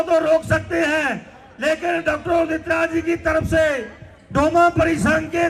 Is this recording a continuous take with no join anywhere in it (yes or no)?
yes